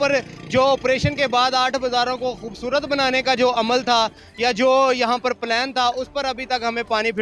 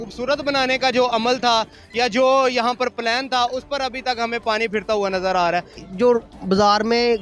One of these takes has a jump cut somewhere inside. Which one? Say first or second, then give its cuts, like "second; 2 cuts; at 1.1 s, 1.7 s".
second; 1 cut; at 5.7 s